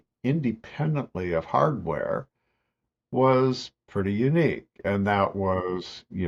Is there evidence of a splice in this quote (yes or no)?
no